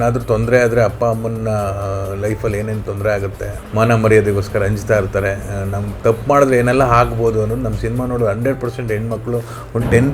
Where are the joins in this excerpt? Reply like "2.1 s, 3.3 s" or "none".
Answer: 3.5 s